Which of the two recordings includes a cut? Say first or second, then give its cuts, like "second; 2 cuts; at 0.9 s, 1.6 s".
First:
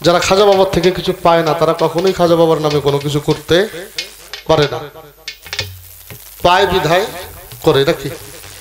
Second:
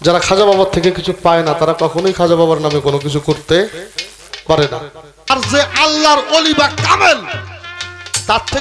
second; 1 cut; at 5.3 s